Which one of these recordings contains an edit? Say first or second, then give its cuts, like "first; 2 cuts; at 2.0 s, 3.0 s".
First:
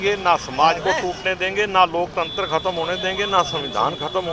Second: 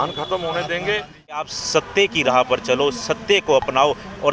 second; 1 cut; at 1.5 s